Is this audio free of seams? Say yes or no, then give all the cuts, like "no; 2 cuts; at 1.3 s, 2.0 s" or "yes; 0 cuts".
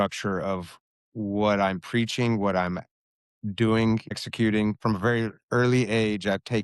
no; 1 cut; at 4.8 s